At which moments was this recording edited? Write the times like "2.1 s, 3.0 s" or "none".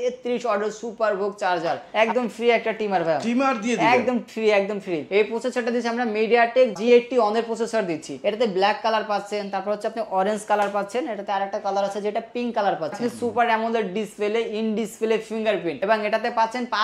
1.8 s, 5.1 s, 8.1 s, 13.0 s